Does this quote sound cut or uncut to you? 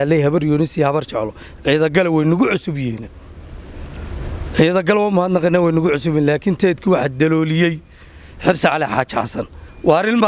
uncut